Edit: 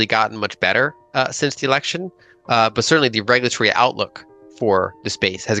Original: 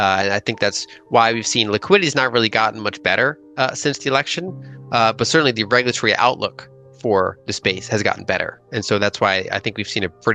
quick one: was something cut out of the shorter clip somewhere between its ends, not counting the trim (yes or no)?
no